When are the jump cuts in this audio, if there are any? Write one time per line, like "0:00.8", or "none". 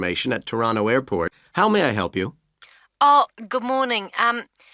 0:01.4